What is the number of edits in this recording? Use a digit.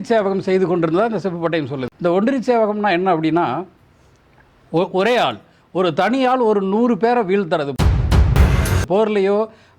2